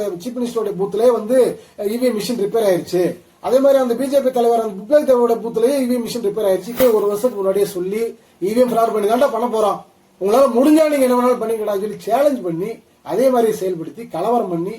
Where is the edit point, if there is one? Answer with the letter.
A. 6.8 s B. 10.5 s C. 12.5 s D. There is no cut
A